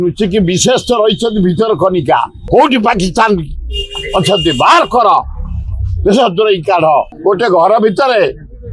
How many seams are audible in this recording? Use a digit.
2